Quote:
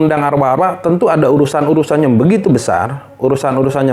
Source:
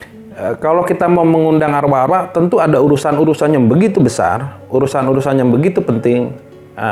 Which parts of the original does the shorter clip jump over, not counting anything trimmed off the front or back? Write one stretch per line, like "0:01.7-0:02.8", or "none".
none